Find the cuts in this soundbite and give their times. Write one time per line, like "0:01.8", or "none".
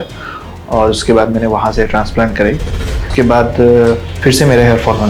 0:03.0
0:04.1